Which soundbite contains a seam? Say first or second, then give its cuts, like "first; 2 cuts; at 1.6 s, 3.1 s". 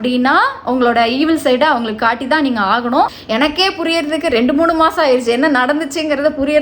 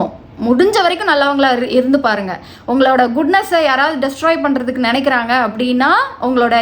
first; 1 cut; at 3.2 s